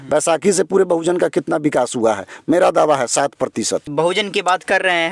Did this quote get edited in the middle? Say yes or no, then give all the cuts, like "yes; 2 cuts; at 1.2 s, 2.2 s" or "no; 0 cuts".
yes; 1 cut; at 3.9 s